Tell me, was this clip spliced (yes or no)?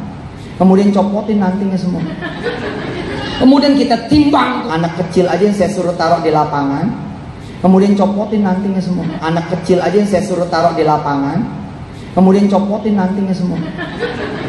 yes